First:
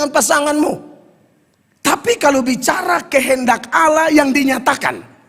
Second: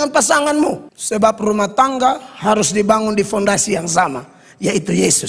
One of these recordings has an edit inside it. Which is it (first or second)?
second